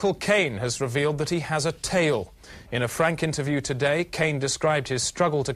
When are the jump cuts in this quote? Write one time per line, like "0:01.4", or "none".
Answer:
0:03.2